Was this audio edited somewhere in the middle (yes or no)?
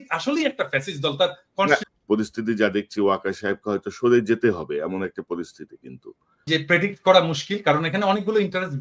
yes